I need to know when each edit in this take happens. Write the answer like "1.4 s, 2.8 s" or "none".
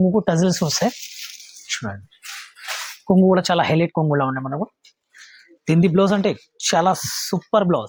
none